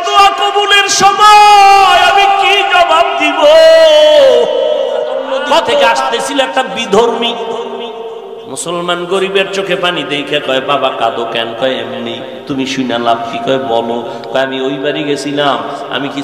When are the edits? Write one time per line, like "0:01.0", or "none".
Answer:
0:05.9